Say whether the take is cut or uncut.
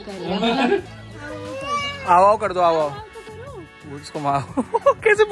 cut